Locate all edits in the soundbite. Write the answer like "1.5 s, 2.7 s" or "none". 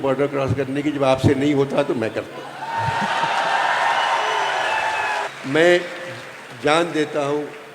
5.3 s